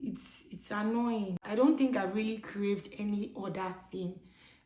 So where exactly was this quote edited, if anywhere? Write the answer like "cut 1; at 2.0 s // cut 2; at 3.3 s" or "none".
cut 1; at 1.4 s